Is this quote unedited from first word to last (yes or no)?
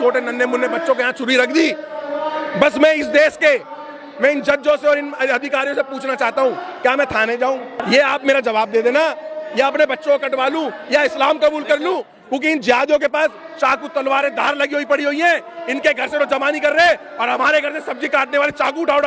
yes